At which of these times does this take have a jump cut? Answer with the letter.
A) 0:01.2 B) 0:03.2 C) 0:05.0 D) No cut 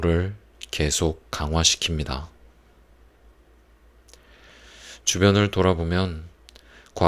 D